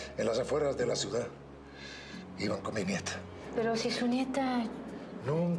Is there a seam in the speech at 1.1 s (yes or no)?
no